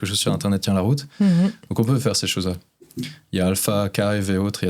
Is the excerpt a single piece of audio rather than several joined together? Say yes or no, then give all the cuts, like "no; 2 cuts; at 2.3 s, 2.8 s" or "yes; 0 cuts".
yes; 0 cuts